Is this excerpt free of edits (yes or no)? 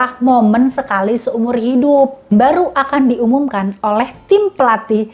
no